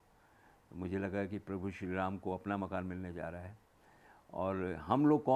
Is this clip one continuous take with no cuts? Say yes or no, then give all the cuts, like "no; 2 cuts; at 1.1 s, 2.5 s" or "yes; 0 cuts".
yes; 0 cuts